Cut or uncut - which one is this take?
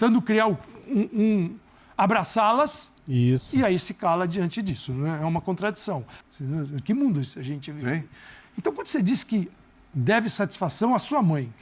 cut